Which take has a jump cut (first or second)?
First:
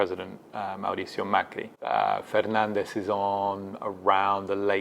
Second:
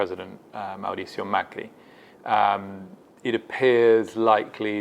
first